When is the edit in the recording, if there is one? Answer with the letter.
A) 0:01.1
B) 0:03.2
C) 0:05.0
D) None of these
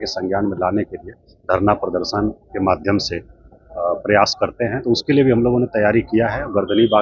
D